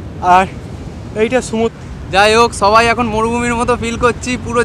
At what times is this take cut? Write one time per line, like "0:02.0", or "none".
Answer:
0:01.7

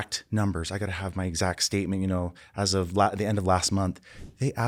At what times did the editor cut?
none

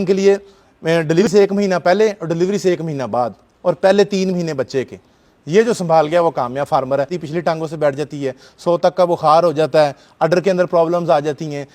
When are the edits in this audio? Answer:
0:01.3
0:07.2

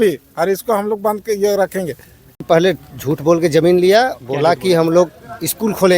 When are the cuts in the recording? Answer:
0:02.5

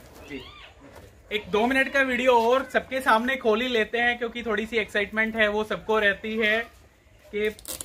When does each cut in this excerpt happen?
none

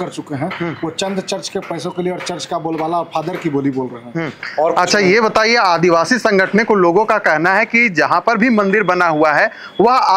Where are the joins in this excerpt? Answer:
none

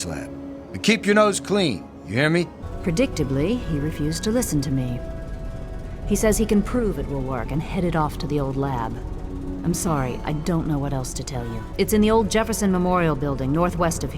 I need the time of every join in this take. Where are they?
0:02.6
0:11.6

